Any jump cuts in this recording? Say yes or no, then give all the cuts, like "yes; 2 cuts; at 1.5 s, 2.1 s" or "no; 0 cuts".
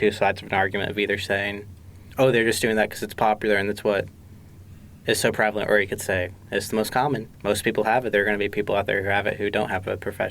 yes; 1 cut; at 7.3 s